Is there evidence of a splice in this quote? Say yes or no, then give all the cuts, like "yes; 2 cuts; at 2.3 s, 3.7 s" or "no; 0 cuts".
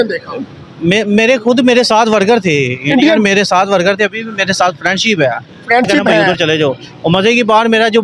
yes; 1 cut; at 6.3 s